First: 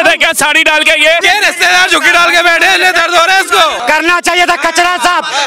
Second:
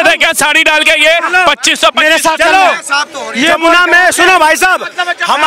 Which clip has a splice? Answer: first; 2 cuts; at 1.2 s, 3.8 s

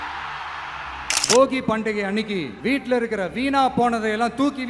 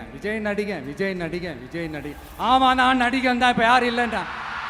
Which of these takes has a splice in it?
first; 2 cuts; at 1.2 s, 2.5 s

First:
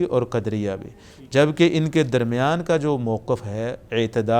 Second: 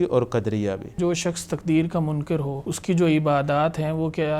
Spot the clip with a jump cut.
second; 2 cuts; at 1.0 s, 2.6 s

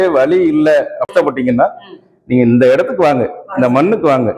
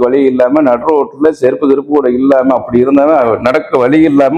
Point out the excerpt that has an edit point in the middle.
first; 1 cut; at 1.1 s

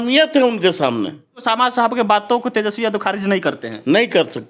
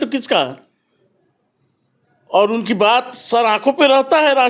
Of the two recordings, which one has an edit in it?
first; 1 cut; at 1.4 s

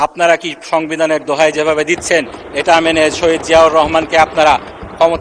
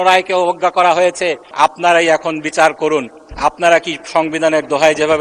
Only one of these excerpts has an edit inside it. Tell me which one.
second; 1 cut; at 1.4 s

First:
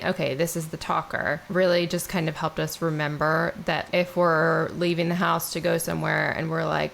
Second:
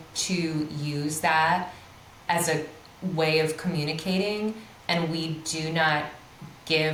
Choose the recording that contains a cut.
first; 2 cuts; at 1.4 s, 3.8 s

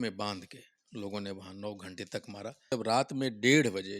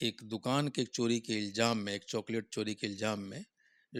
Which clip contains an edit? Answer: first; 1 cut; at 2.7 s

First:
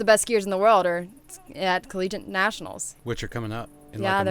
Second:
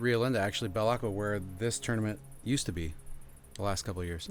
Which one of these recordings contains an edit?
first; 1 cut; at 2.9 s

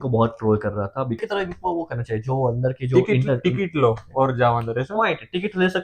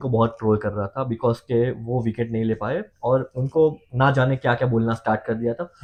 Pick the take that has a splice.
first; 1 cut; at 1.2 s

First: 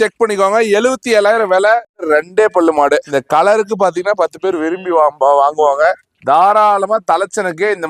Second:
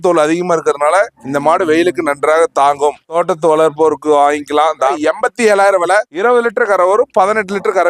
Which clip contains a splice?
first; 1 cut; at 1.9 s

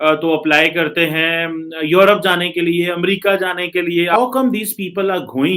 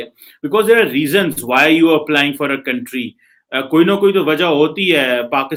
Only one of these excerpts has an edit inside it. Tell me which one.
first; 1 cut; at 4.1 s

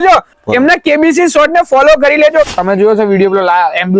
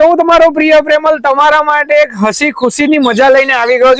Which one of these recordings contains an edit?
first; 1 cut; at 2.5 s

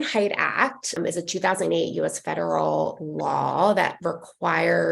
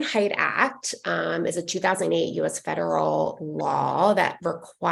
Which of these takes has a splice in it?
first; 1 cut; at 1.0 s

